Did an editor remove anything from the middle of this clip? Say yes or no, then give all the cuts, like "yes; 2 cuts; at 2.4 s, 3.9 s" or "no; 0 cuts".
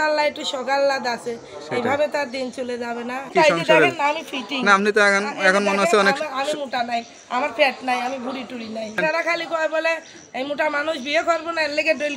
yes; 2 cuts; at 3.3 s, 9.0 s